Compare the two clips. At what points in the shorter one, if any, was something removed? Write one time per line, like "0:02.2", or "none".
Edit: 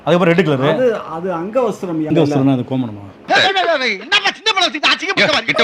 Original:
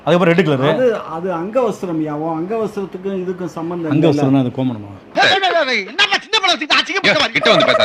0:02.1